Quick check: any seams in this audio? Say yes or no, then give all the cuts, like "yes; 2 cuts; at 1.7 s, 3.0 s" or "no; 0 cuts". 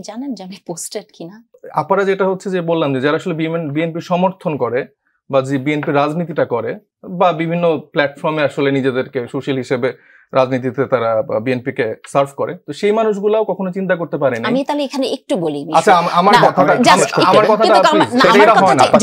yes; 1 cut; at 1.5 s